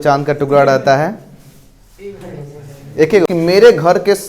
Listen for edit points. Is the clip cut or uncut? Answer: cut